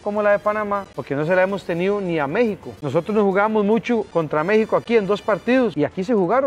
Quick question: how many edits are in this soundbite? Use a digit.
4